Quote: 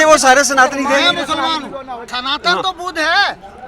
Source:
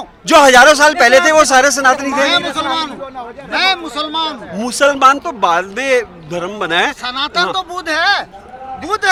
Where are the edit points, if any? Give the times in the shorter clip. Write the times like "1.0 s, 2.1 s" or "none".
2.1 s